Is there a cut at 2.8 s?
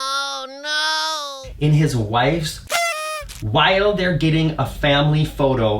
yes; 1 cut; at 2.8 s

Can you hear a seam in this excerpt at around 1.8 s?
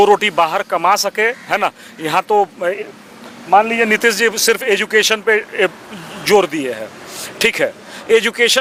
no; 0 cuts

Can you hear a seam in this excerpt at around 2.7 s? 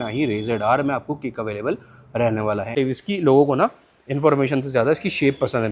yes; 1 cut; at 2.7 s

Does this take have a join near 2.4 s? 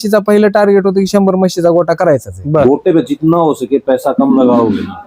yes; 1 cut; at 2.4 s

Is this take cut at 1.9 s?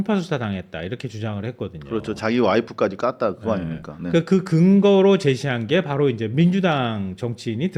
no; 0 cuts

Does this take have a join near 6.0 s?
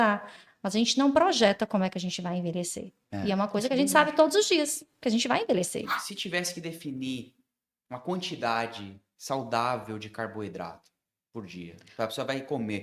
yes; 1 cut; at 6.0 s

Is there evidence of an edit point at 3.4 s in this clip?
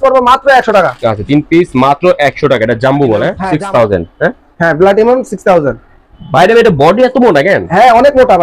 yes; 1 cut; at 3.4 s

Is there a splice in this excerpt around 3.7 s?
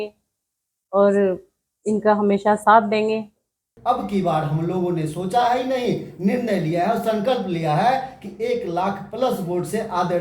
yes; 1 cut; at 3.7 s

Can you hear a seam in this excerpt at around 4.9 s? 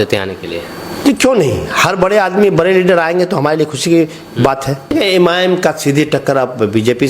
yes; 1 cut; at 4.9 s

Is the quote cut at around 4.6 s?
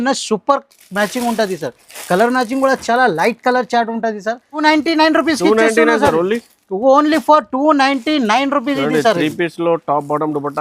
yes; 1 cut; at 4.6 s

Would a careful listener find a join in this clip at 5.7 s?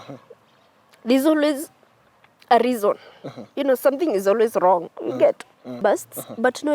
yes; 1 cut; at 5.7 s

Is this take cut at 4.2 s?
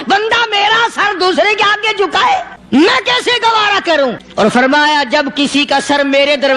yes; 2 cuts; at 2.1 s, 4.2 s

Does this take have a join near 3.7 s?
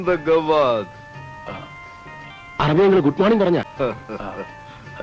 yes; 1 cut; at 3.7 s

